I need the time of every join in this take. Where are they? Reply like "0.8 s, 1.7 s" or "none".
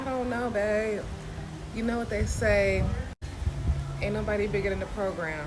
none

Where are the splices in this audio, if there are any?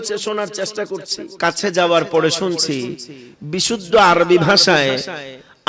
1.2 s

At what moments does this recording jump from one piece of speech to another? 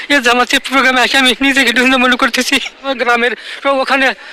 2.9 s

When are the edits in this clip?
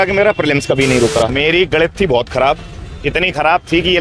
1.3 s

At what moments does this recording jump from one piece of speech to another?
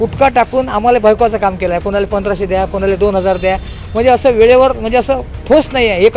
none

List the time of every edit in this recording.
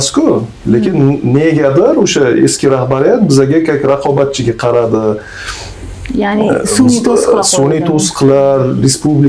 none

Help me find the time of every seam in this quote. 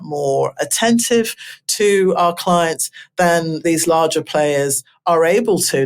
3.6 s

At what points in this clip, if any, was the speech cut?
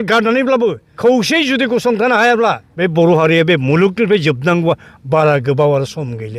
0.9 s, 2.7 s

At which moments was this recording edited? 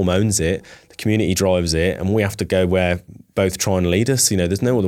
none

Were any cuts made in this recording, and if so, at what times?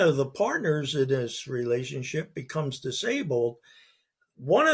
none

